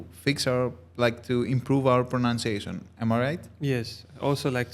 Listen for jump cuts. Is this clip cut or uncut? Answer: uncut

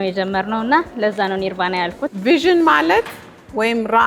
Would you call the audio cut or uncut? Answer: cut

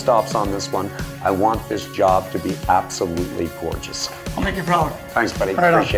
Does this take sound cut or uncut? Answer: uncut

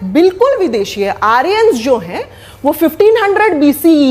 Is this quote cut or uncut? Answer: uncut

